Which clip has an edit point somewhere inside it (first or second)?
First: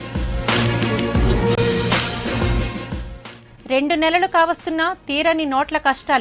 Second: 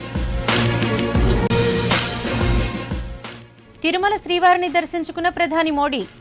second